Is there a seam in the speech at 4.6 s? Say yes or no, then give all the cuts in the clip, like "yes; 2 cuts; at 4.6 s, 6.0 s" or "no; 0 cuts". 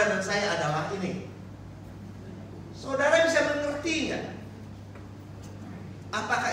no; 0 cuts